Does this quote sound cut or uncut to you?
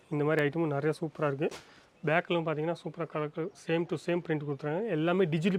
uncut